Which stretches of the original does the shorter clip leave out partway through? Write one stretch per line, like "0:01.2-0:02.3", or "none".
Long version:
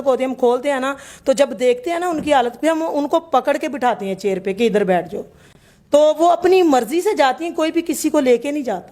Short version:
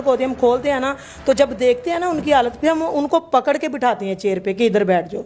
none